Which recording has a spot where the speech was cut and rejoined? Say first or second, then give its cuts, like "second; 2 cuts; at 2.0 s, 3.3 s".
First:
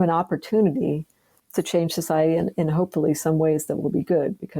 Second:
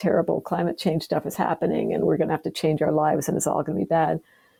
first; 1 cut; at 1.3 s